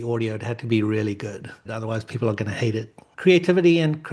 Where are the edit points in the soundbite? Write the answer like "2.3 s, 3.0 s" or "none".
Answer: 1.6 s, 3.1 s